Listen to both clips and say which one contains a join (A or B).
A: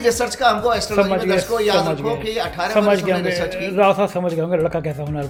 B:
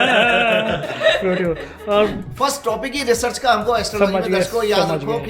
B